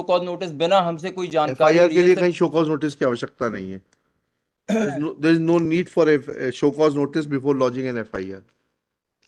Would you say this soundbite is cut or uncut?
uncut